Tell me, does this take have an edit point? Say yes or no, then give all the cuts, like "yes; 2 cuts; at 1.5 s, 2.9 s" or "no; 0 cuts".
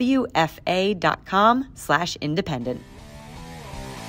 yes; 1 cut; at 3.0 s